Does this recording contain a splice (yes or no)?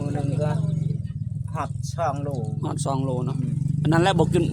no